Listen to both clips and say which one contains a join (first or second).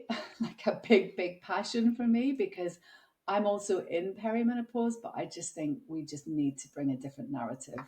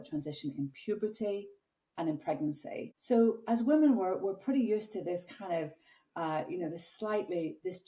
second